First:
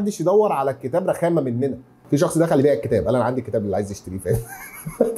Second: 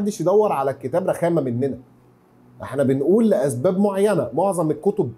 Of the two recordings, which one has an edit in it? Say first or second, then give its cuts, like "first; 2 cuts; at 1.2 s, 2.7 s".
first; 1 cut; at 2.0 s